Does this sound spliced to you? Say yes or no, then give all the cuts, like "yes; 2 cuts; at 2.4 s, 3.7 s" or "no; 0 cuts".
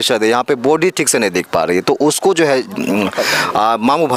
no; 0 cuts